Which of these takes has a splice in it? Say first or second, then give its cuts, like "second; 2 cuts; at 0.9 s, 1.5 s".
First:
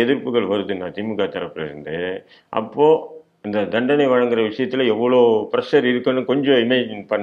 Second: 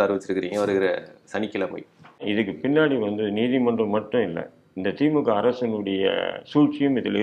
second; 1 cut; at 2.2 s